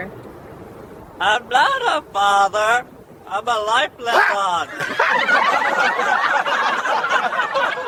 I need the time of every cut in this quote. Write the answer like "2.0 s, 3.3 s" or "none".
none

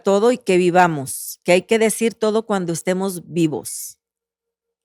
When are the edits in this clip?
none

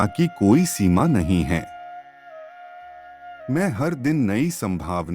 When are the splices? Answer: 1.7 s, 3.2 s

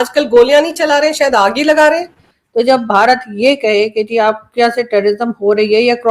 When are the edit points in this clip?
2.3 s

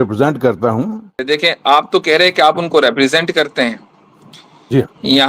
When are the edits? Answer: 1.2 s

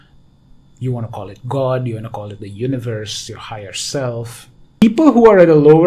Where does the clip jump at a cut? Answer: 4.8 s

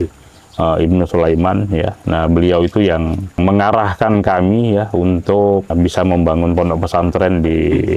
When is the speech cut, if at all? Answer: 3.4 s, 5.7 s

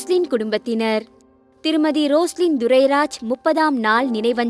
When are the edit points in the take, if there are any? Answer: none

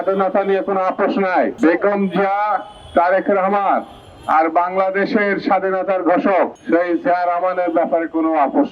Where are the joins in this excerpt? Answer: 1.5 s, 6.6 s

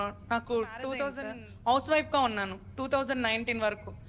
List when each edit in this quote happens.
1.3 s

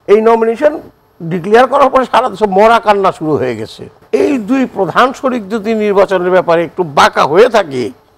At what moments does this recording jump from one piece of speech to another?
3.9 s

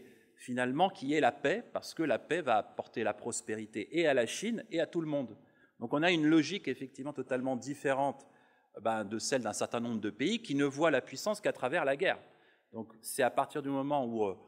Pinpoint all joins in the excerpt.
none

